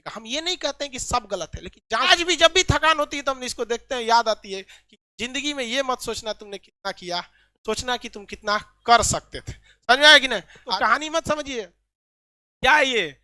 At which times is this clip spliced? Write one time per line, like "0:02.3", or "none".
0:02.1
0:10.6